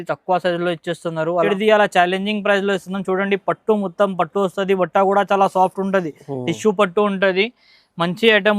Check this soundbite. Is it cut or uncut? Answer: cut